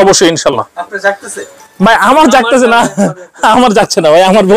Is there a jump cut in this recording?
no; 0 cuts

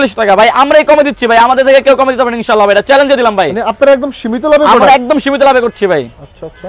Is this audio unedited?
yes; 0 cuts

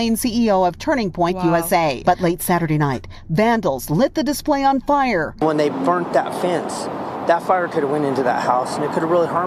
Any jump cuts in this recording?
yes; 1 cut; at 2.0 s

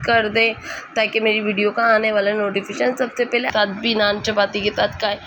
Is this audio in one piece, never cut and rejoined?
no; 1 cut; at 3.5 s

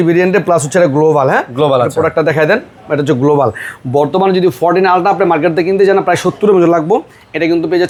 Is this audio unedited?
yes; 0 cuts

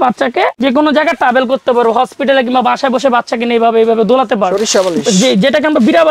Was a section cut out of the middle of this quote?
yes; 1 cut; at 4.5 s

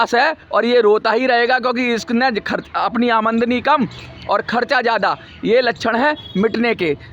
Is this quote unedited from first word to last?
yes; 0 cuts

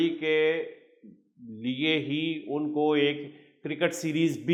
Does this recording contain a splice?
no; 0 cuts

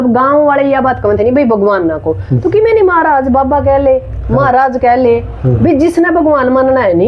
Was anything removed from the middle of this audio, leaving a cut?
no; 0 cuts

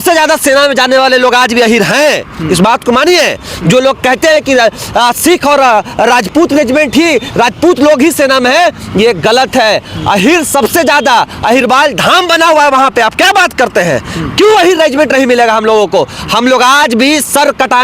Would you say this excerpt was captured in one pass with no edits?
yes; 0 cuts

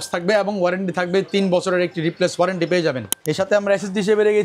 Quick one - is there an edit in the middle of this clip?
yes; 1 cut; at 3.1 s

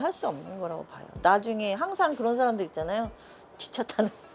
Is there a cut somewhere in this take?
no; 0 cuts

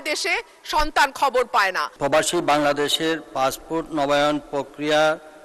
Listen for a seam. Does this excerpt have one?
yes; 1 cut; at 1.9 s

